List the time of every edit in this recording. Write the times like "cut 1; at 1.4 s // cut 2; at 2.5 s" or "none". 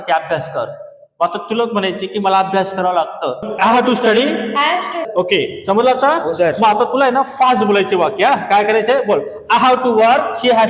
cut 1; at 5.0 s